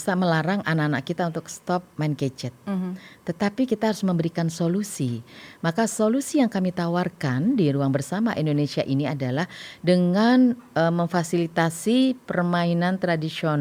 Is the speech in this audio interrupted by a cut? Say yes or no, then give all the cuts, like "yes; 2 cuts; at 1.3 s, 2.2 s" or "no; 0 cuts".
no; 0 cuts